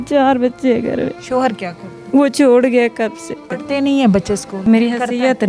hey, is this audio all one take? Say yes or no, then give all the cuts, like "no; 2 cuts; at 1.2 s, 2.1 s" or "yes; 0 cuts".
no; 4 cuts; at 1.2 s, 1.9 s, 3.5 s, 4.7 s